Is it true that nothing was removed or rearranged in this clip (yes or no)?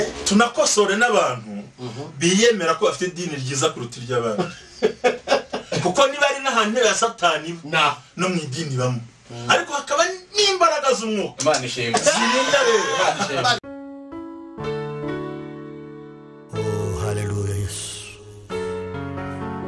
no